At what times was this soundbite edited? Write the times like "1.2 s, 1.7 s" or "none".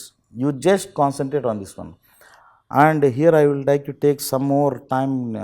none